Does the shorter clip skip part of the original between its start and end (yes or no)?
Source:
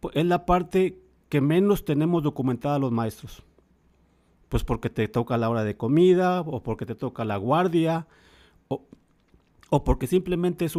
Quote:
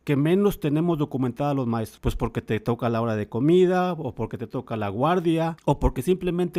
yes